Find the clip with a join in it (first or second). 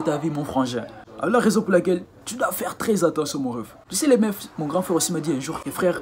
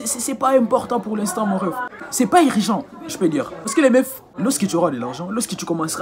second